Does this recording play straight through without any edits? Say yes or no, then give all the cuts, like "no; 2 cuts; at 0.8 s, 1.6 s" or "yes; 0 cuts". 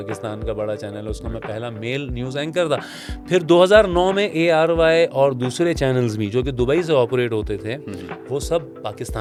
yes; 0 cuts